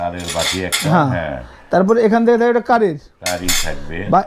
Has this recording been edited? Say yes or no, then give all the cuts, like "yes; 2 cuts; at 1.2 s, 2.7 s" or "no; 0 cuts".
no; 0 cuts